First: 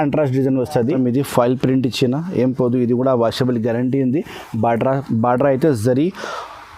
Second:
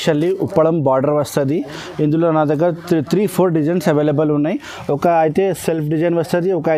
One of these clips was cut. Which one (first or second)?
first